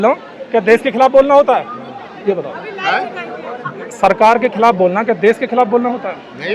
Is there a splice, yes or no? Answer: no